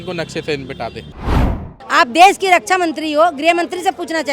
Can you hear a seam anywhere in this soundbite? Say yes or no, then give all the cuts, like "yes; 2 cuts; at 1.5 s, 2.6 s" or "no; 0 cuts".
yes; 1 cut; at 1.4 s